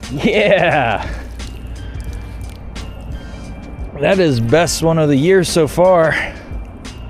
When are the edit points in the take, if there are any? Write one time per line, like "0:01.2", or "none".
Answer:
none